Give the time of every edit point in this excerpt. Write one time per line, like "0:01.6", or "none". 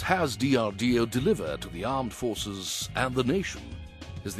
none